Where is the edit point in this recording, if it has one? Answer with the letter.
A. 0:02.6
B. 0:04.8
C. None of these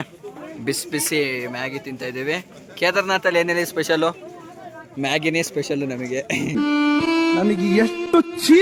C